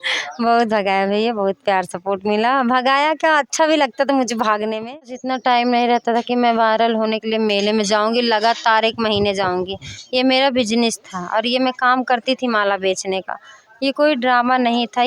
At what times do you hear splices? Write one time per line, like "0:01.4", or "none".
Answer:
0:04.9